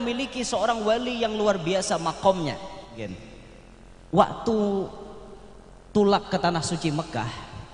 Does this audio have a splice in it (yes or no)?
yes